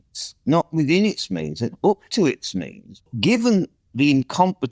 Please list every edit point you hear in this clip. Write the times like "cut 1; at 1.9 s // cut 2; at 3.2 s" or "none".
cut 1; at 3.1 s